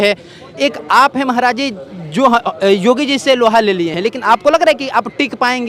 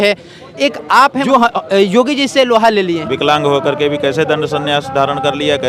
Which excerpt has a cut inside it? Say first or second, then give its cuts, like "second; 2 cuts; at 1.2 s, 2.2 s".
second; 2 cuts; at 1.2 s, 3.0 s